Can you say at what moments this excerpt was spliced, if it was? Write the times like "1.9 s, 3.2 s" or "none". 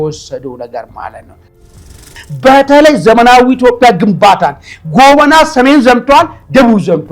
1.6 s